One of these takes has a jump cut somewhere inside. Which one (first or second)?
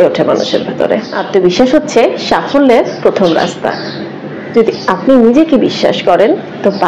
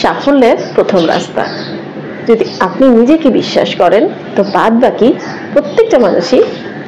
first